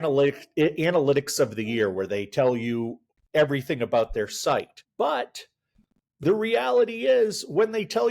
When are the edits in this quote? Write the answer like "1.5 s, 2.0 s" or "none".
4.8 s